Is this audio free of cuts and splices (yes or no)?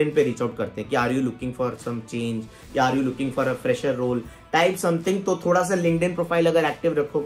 yes